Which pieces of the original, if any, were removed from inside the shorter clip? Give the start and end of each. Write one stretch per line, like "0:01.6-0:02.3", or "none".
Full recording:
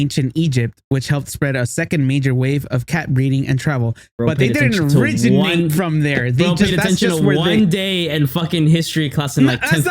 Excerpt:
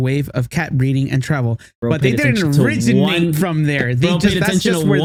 none